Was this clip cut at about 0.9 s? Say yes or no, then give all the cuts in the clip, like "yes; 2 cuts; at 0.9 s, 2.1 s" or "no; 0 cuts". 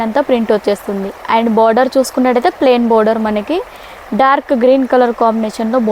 no; 0 cuts